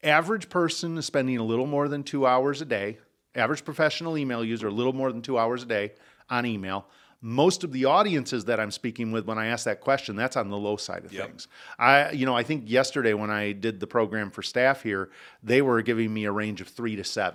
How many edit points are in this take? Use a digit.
0